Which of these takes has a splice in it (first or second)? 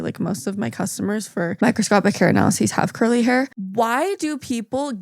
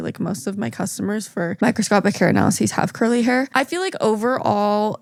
first